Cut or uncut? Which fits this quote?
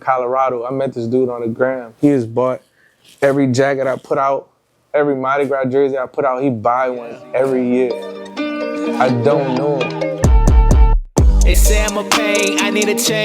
cut